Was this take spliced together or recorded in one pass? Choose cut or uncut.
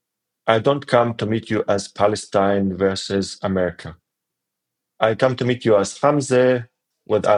uncut